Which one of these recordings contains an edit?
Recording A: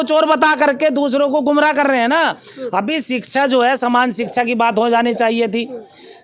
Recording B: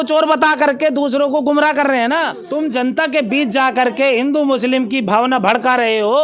B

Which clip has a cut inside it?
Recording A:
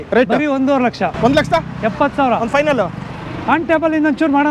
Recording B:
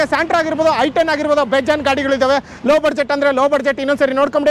A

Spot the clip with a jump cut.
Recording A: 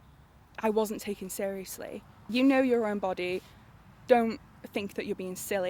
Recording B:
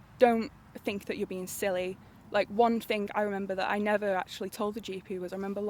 A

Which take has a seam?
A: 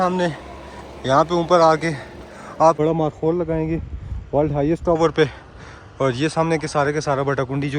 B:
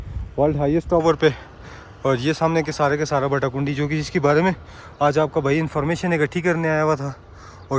A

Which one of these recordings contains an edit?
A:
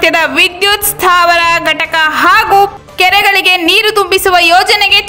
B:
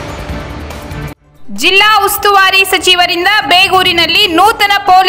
B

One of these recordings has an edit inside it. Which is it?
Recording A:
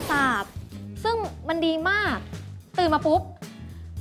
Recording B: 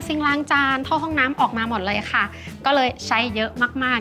A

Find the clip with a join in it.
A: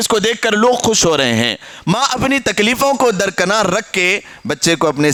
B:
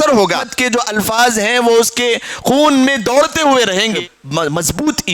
B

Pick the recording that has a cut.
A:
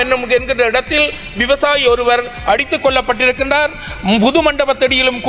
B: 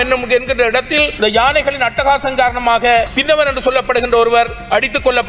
B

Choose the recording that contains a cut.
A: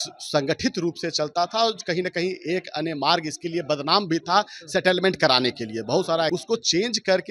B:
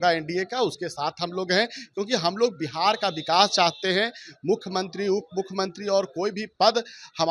A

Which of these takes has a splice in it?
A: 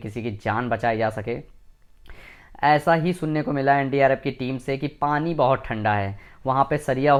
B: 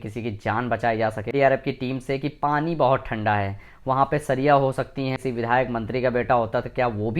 B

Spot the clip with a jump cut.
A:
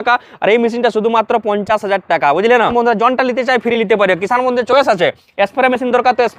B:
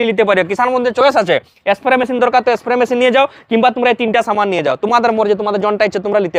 A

